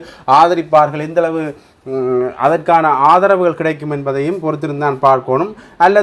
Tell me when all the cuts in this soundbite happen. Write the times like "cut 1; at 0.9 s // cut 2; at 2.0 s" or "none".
none